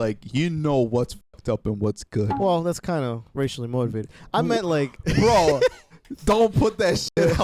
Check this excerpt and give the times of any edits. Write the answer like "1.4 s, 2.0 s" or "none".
none